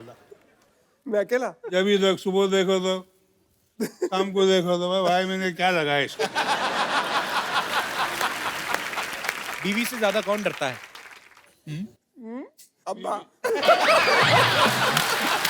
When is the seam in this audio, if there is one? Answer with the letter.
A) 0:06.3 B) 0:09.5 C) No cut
B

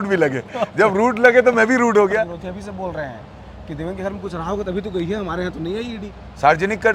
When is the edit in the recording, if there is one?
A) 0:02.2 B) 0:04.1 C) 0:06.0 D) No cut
A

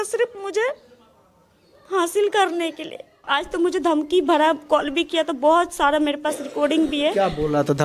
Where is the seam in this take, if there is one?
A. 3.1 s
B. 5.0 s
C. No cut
A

